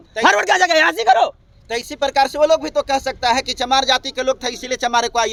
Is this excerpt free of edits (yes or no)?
yes